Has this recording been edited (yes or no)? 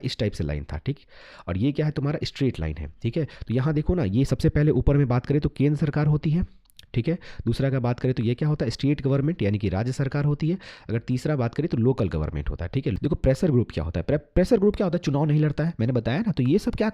yes